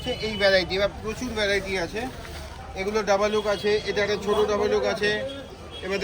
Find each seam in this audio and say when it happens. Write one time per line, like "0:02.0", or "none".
none